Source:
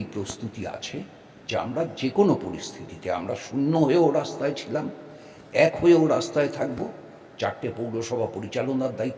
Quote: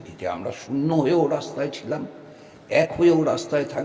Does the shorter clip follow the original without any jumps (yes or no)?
yes